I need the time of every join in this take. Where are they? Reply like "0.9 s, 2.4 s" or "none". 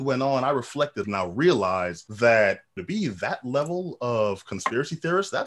1.0 s, 2.0 s, 2.7 s